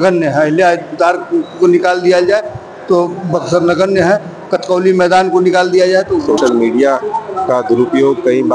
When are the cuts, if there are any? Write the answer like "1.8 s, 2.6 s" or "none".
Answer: 6.4 s